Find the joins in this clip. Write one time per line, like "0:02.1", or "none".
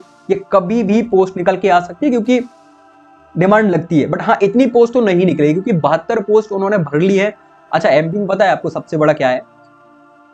none